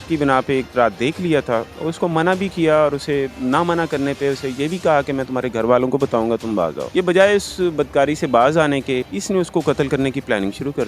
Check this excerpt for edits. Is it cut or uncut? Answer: cut